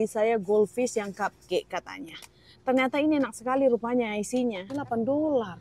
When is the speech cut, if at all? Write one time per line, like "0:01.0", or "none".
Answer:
0:04.7